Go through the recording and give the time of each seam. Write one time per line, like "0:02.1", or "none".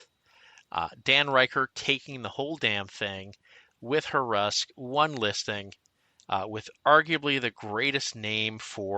none

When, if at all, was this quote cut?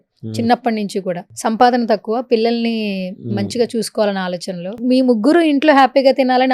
0:01.3
0:04.8

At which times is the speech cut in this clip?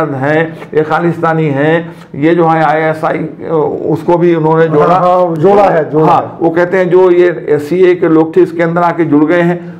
none

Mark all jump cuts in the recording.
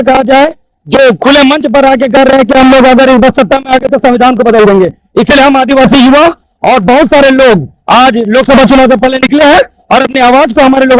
none

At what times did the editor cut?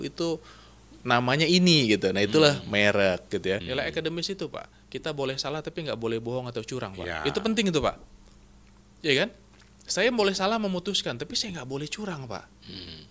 0:03.7

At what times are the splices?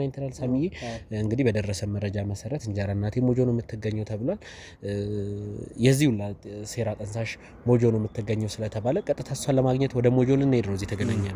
none

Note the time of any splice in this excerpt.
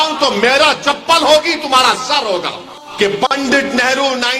0:02.8

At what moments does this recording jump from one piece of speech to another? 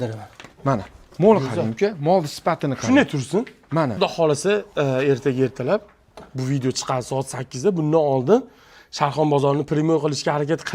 0:03.9

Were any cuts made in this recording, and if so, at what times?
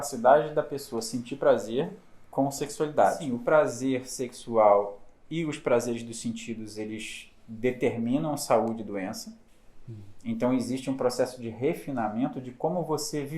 0:03.2

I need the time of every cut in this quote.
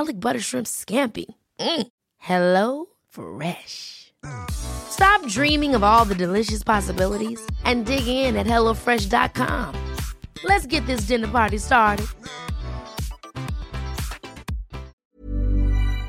0:15.0

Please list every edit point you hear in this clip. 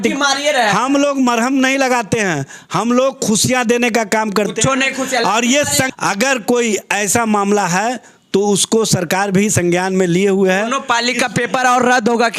0:05.9

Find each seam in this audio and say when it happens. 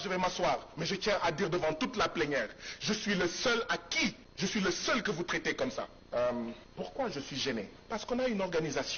0:04.2
0:06.0
0:06.6
0:07.8

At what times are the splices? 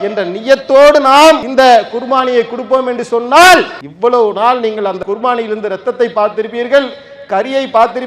0:01.5
0:03.8
0:05.0

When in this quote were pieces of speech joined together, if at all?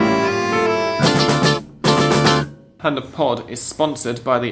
0:02.6

